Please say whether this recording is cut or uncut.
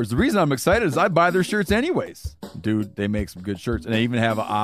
uncut